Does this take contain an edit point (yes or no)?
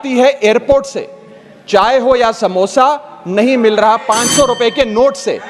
no